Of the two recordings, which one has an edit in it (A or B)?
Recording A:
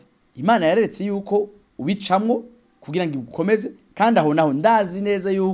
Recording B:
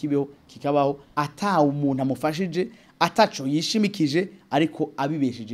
B